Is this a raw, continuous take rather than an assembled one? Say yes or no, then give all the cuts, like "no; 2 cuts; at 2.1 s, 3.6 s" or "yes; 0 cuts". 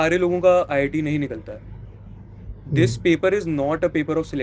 yes; 0 cuts